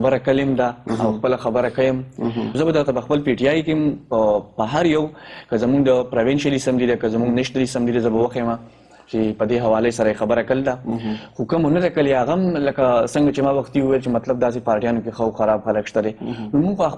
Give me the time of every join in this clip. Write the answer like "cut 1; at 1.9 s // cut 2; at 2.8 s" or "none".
cut 1; at 2.5 s